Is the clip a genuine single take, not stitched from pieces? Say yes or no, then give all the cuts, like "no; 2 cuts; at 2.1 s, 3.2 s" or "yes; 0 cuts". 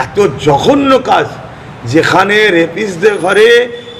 yes; 0 cuts